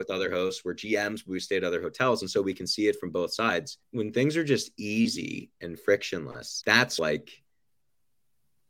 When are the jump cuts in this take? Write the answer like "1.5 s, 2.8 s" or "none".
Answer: 3.8 s, 6.9 s